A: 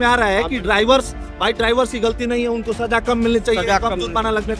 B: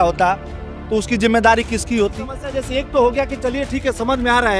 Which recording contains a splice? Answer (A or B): B